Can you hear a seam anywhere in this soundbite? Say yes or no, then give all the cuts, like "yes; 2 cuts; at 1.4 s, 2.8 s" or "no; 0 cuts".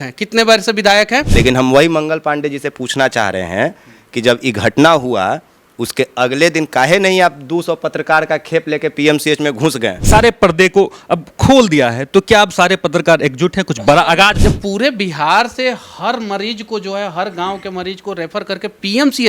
yes; 3 cuts; at 1.3 s, 10.0 s, 14.4 s